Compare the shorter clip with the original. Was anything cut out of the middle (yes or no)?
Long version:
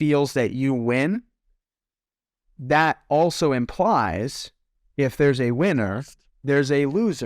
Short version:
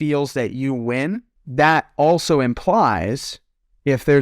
yes